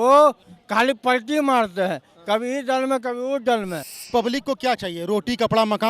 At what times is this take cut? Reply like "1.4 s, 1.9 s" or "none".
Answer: 3.9 s